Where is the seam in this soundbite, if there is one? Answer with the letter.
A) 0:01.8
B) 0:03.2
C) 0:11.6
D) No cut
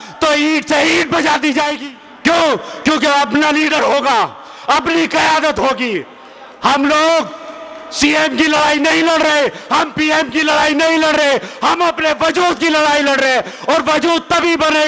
A